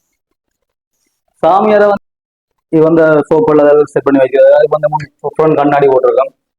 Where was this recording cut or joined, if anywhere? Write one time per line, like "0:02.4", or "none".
0:02.0